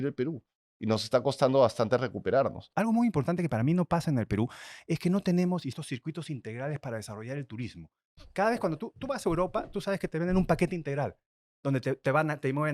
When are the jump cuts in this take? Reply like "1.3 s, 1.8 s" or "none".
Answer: 2.6 s, 5.7 s